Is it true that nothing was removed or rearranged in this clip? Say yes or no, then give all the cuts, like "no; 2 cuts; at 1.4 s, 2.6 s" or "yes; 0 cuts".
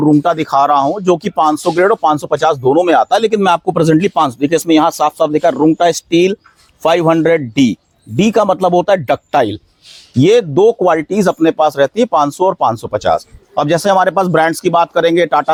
yes; 0 cuts